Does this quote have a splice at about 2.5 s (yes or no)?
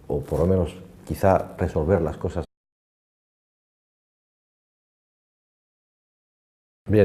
no